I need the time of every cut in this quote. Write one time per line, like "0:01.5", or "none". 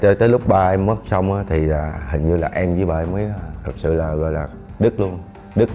none